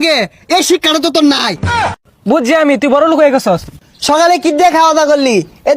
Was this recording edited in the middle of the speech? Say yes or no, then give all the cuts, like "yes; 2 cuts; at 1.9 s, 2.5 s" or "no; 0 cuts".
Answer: yes; 2 cuts; at 1.9 s, 3.7 s